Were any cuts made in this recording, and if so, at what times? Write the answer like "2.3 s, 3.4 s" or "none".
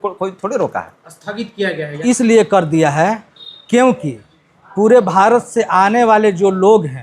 2.0 s